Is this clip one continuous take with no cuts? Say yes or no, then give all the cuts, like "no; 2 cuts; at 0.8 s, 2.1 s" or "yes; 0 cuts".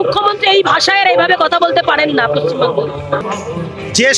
no; 1 cut; at 3.2 s